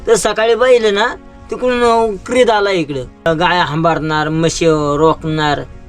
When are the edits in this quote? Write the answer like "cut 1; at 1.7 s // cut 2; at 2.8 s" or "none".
cut 1; at 3.3 s